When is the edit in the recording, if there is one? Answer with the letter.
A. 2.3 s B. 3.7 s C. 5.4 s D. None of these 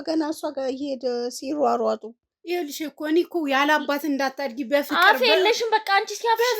A